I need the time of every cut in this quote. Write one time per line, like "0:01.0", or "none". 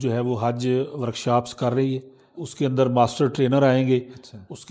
0:02.4